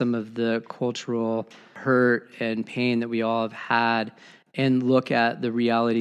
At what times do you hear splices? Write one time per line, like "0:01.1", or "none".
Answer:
0:01.8